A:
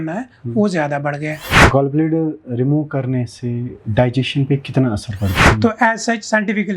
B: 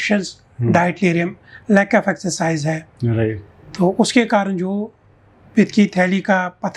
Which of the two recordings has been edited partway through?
A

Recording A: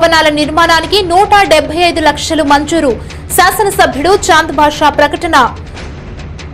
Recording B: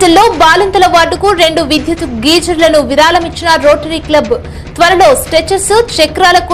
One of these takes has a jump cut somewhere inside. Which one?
A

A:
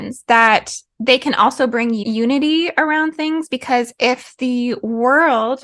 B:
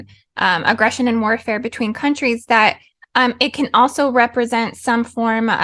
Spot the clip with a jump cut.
A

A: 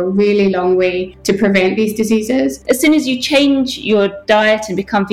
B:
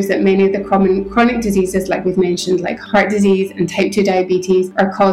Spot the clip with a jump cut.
A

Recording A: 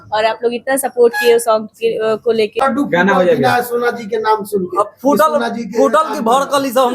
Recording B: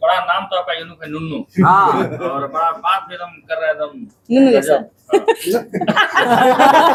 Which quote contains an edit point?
A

